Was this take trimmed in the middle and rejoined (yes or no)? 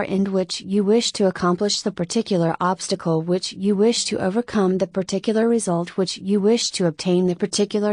no